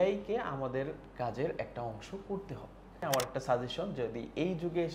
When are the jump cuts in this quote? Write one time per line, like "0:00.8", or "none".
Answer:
0:03.0

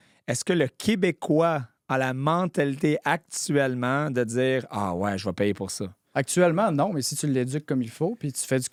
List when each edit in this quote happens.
none

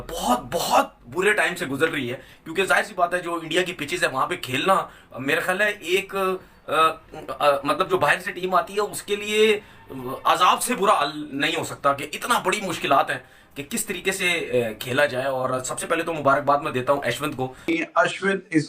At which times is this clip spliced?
0:17.6

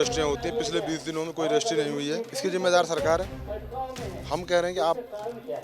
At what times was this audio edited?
0:02.3

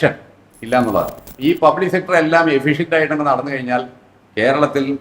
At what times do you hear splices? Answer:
0:01.2

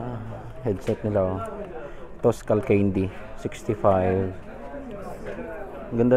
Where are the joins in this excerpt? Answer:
none

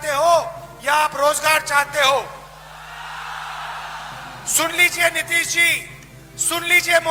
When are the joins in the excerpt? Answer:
none

